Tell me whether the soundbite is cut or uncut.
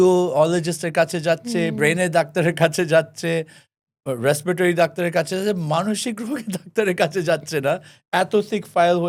uncut